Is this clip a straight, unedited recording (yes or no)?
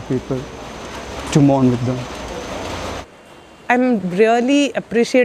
no